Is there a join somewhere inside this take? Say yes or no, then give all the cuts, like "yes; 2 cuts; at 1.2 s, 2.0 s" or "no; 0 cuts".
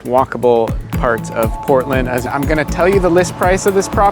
yes; 1 cut; at 2.3 s